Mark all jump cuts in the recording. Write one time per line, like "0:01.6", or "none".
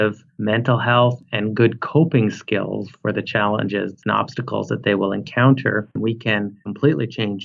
0:06.3